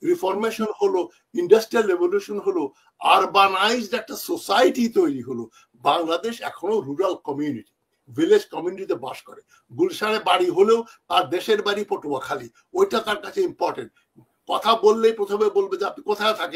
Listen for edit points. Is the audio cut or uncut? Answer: uncut